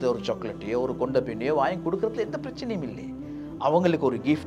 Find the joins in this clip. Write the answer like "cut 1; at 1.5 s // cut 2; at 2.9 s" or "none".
none